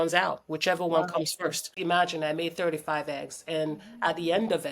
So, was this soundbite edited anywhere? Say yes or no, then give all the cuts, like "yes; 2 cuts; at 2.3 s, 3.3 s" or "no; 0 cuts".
yes; 1 cut; at 1.7 s